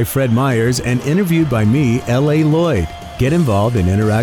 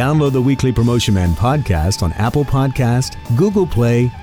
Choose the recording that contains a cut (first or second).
second